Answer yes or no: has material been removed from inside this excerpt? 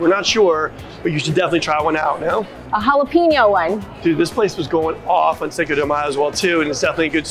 no